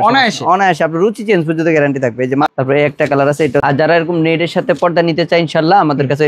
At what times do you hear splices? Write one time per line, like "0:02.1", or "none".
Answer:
0:02.5
0:03.6